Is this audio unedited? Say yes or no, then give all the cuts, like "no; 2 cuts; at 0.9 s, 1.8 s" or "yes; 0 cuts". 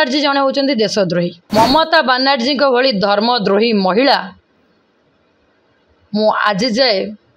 no; 1 cut; at 1.4 s